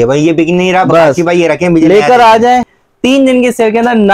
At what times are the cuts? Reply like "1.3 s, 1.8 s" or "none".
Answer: 2.8 s

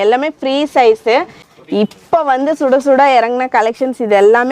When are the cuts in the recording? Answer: 1.4 s

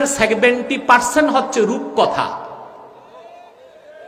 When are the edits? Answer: none

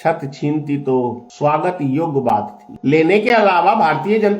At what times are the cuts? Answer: 1.2 s, 2.6 s

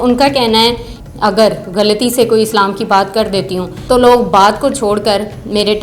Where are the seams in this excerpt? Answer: 0.9 s, 3.7 s

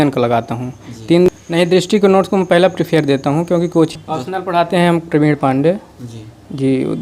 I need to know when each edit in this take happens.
1.3 s, 3.9 s

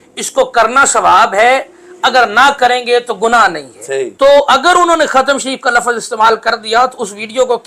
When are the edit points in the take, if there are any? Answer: 4.1 s

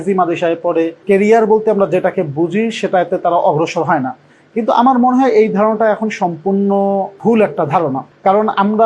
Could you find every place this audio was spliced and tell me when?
1.0 s

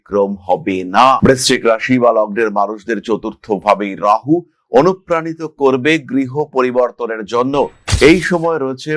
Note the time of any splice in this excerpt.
7.8 s

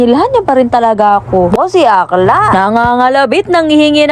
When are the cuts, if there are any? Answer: 1.5 s

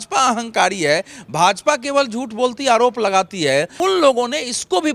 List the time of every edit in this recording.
3.8 s

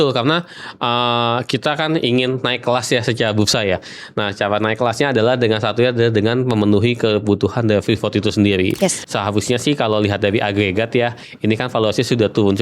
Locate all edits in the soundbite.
9.0 s

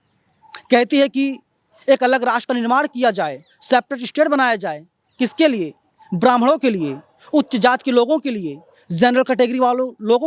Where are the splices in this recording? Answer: none

